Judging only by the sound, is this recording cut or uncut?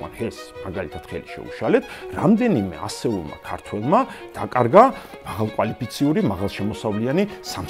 uncut